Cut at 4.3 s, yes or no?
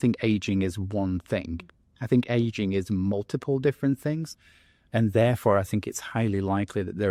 no